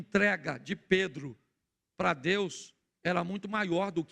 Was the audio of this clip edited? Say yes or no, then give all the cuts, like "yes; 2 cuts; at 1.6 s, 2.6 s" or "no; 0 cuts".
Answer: no; 0 cuts